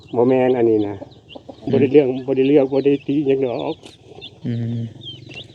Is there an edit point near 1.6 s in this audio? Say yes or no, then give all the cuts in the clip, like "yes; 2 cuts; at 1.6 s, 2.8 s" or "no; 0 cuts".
yes; 1 cut; at 1.6 s